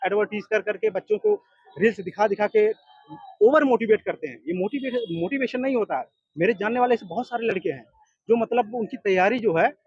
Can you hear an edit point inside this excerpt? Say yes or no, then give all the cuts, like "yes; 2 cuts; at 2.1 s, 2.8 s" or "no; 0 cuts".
no; 0 cuts